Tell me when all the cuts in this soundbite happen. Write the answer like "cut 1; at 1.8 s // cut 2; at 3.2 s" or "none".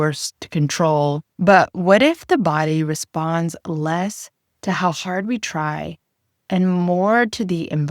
cut 1; at 1.3 s